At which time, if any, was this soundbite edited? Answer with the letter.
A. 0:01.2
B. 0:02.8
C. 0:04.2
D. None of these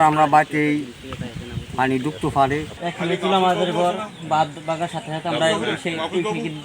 B